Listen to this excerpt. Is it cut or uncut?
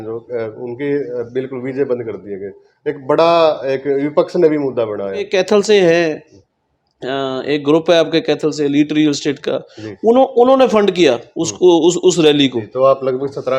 cut